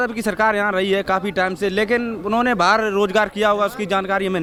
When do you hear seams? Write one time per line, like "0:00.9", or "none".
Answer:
none